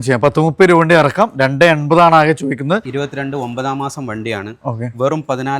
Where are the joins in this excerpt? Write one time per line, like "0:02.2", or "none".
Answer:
0:03.0